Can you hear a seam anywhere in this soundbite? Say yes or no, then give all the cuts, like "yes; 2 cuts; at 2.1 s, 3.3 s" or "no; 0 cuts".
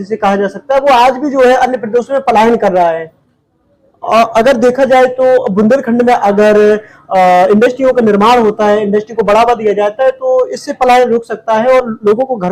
no; 0 cuts